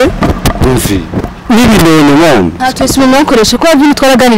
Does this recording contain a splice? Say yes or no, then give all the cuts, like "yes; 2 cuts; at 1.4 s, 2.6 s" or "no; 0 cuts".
yes; 1 cut; at 2.6 s